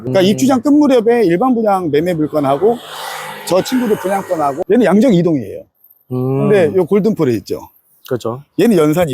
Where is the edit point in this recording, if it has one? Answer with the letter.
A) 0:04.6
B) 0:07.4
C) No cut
A